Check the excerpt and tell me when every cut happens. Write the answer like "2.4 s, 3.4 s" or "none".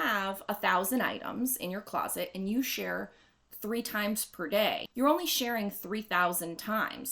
4.8 s